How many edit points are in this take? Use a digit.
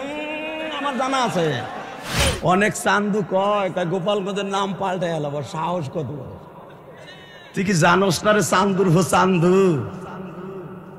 1